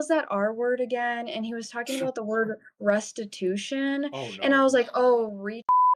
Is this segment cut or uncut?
uncut